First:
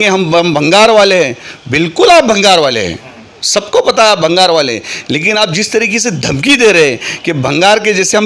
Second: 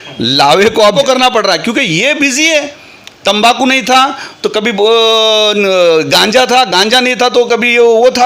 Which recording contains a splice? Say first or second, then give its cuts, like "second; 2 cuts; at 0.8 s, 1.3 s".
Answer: second; 1 cut; at 0.9 s